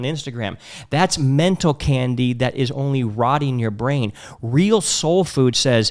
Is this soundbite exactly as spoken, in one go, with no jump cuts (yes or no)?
yes